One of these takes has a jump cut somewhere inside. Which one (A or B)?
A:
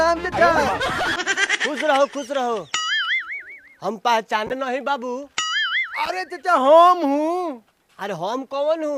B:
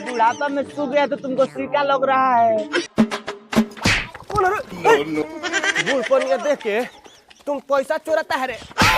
B